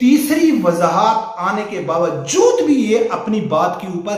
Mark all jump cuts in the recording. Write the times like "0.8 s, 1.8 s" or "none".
none